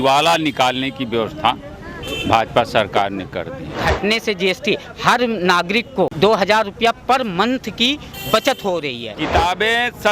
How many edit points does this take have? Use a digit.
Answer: 3